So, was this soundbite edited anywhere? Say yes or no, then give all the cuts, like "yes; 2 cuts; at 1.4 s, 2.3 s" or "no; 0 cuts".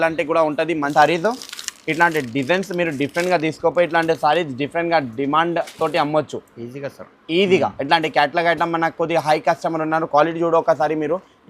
yes; 1 cut; at 0.9 s